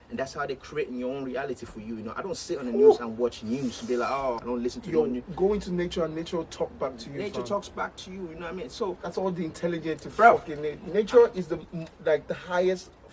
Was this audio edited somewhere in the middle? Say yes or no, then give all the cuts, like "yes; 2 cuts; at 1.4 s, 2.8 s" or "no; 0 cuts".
yes; 1 cut; at 4.4 s